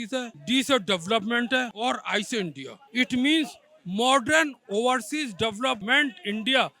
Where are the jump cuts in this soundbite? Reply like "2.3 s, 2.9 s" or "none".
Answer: 1.7 s, 5.8 s